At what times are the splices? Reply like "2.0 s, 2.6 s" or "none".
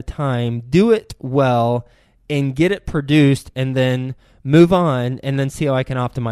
none